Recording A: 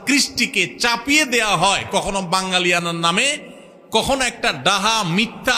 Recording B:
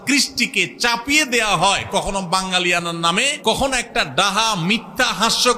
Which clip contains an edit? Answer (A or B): B